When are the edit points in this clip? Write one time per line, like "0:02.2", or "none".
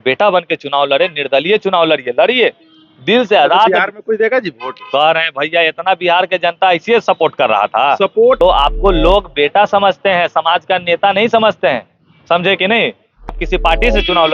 0:08.4
0:13.3